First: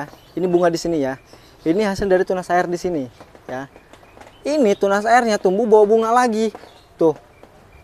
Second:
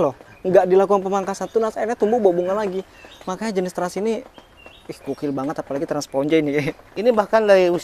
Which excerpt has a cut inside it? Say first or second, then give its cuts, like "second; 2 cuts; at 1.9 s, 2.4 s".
second; 1 cut; at 6.8 s